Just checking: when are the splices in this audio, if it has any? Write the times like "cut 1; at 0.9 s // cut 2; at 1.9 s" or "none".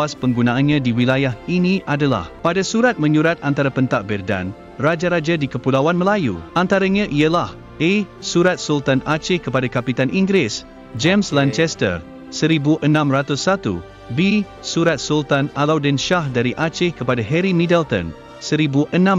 cut 1; at 2.3 s // cut 2; at 6.4 s